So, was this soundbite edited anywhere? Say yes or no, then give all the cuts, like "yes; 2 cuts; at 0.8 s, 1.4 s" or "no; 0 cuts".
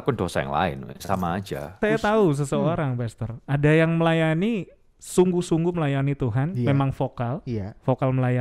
yes; 1 cut; at 1.8 s